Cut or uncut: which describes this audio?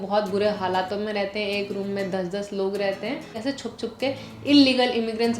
cut